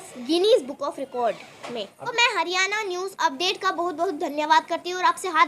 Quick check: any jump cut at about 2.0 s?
yes; 1 cut; at 2.0 s

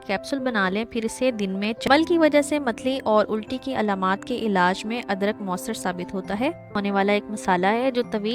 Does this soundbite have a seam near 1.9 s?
yes; 2 cuts; at 1.9 s, 6.8 s

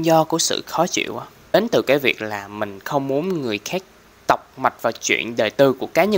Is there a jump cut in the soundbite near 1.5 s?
yes; 1 cut; at 1.5 s

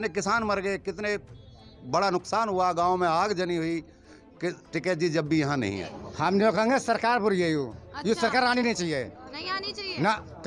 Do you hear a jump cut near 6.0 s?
yes; 1 cut; at 6.0 s

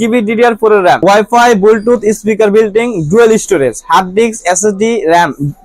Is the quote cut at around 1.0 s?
yes; 1 cut; at 1.0 s

